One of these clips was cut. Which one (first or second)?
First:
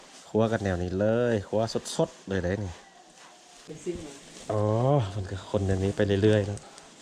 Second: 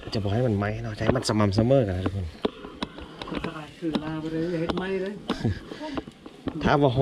first